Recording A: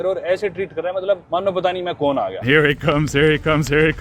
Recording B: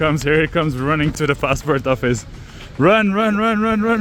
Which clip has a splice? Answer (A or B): A